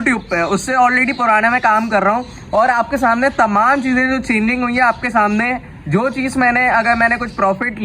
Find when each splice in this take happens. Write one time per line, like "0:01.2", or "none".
none